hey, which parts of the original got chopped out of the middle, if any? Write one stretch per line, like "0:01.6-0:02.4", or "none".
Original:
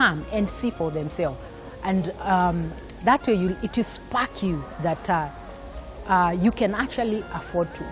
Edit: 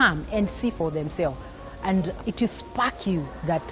0:02.2-0:03.6